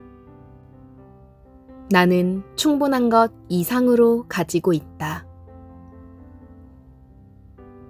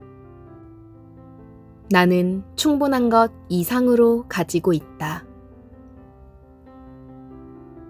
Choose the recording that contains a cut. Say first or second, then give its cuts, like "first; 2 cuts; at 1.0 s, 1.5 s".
second; 1 cut; at 5.2 s